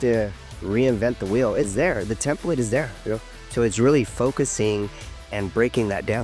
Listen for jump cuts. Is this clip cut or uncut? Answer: uncut